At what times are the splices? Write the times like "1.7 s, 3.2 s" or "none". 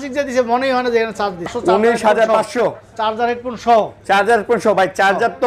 1.5 s